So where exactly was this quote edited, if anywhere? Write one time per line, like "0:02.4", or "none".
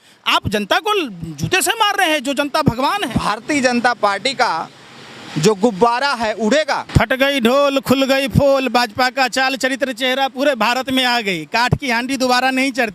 0:03.1
0:06.8